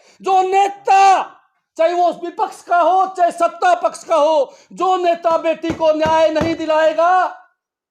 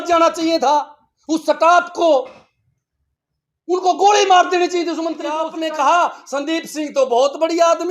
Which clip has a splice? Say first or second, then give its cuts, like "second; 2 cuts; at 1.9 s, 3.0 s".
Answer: second; 1 cut; at 5.4 s